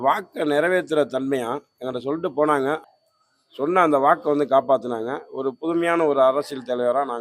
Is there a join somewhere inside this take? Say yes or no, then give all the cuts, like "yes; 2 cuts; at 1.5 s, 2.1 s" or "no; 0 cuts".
yes; 1 cut; at 2.9 s